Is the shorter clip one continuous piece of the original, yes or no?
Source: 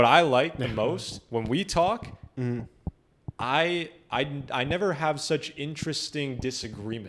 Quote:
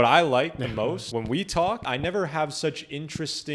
no